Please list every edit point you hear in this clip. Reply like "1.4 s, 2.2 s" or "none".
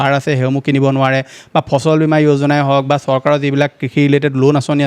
none